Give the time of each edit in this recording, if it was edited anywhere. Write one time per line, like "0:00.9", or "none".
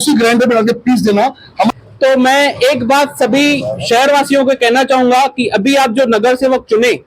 0:01.7